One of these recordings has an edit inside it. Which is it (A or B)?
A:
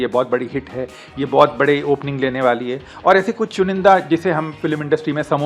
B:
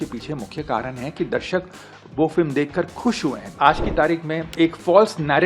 B